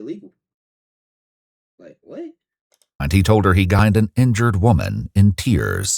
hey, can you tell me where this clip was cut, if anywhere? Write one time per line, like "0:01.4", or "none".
0:03.8